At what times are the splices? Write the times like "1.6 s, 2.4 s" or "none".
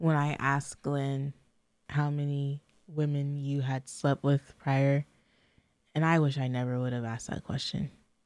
1.8 s